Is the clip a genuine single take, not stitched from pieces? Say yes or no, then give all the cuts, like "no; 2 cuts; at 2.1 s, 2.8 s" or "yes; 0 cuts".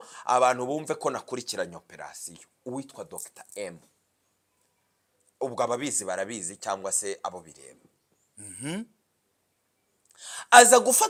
yes; 0 cuts